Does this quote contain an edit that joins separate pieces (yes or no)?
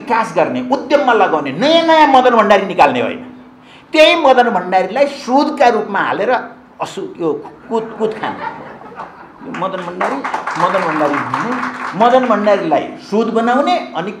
no